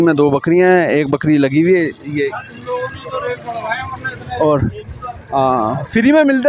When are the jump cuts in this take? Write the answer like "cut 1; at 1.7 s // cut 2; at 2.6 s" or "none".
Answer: none